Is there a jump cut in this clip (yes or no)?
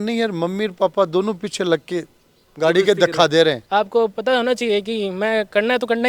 yes